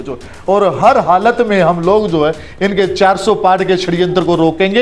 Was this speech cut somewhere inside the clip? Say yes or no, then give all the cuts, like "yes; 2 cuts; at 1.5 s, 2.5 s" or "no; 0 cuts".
no; 0 cuts